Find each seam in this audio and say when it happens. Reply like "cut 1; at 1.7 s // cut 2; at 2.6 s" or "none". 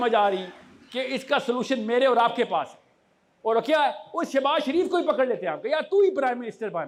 none